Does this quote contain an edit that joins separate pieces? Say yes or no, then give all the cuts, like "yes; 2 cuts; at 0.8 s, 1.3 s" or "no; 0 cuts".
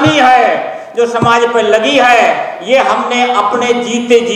no; 0 cuts